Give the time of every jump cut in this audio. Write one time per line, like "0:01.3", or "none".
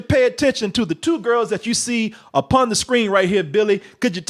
none